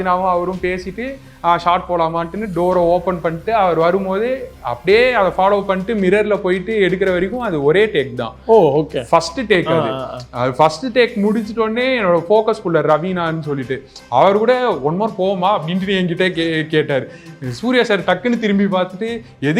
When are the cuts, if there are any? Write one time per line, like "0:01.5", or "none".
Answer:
none